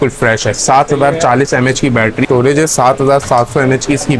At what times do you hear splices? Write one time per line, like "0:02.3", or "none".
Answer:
0:02.2